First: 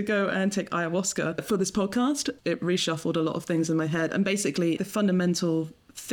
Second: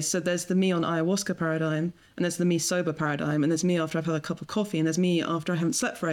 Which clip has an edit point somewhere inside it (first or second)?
first